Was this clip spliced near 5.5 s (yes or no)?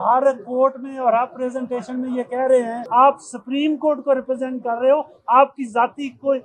no